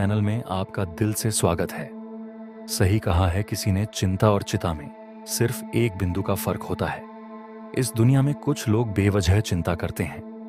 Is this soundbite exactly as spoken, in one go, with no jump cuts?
yes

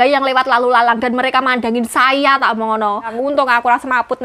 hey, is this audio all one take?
no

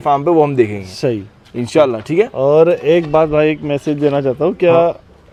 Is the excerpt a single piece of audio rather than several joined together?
yes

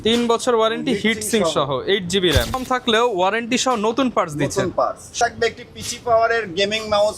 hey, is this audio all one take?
no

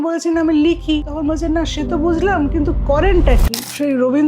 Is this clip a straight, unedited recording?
no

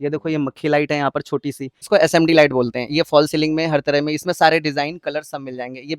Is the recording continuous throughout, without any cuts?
no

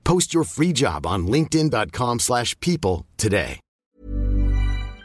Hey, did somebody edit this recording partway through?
yes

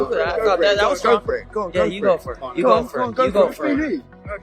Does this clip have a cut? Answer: yes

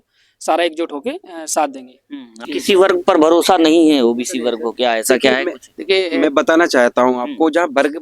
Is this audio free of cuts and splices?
no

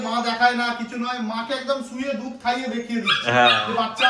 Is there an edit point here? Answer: no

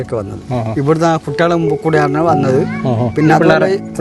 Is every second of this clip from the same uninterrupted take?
yes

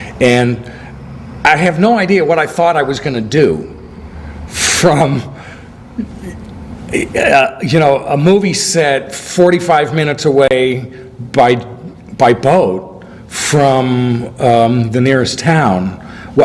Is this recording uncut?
yes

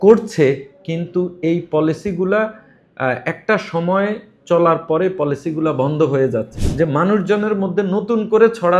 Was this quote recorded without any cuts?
no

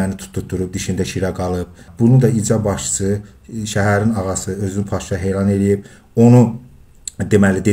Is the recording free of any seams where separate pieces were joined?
no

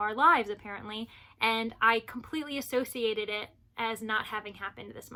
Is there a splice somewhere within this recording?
no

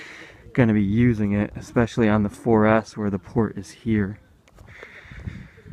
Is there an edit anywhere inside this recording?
no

